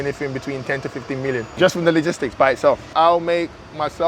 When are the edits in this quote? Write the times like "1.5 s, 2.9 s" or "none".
1.5 s, 2.8 s